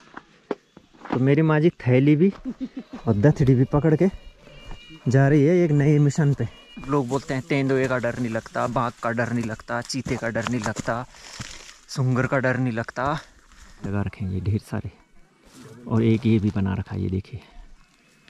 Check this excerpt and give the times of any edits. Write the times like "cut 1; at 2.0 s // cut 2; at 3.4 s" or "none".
cut 1; at 6.8 s // cut 2; at 13.9 s